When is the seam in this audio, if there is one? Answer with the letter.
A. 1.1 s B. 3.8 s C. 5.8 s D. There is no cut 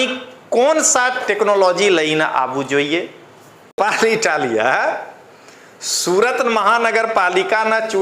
B